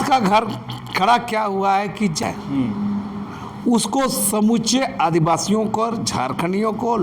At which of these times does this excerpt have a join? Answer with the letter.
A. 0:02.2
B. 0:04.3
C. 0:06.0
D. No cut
A